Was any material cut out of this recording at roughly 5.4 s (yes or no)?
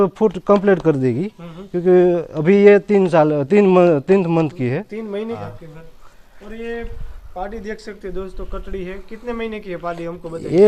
yes